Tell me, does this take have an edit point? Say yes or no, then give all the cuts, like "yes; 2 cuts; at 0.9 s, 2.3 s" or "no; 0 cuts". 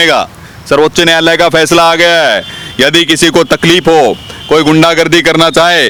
no; 0 cuts